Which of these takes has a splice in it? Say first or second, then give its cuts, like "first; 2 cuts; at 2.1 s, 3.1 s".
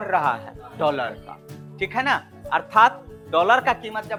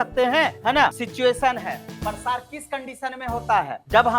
second; 1 cut; at 1.0 s